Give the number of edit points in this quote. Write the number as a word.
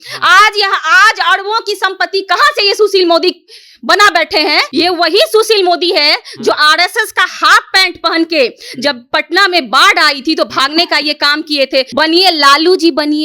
two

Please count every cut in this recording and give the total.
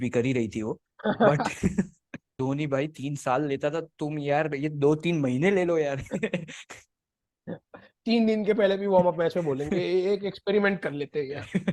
one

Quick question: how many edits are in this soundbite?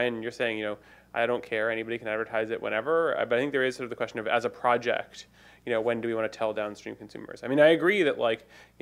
one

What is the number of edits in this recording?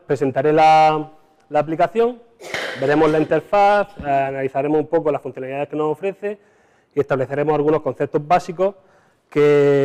one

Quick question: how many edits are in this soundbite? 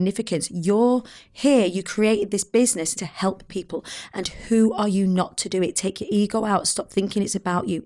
one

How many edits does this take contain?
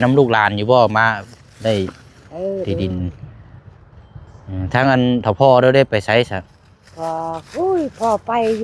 zero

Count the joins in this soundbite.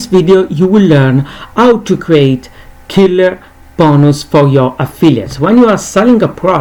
zero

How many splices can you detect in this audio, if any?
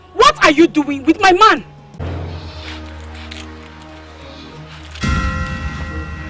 one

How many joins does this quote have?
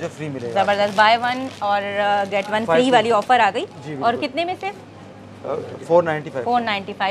zero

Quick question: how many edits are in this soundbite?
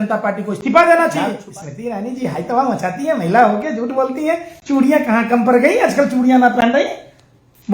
one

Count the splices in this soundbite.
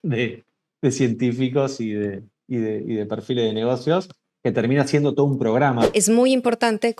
one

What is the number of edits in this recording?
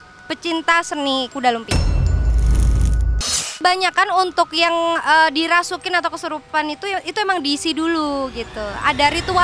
two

